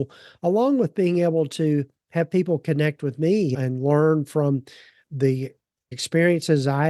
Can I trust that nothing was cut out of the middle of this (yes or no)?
no